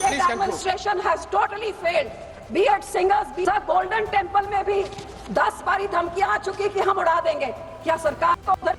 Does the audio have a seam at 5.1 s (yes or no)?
no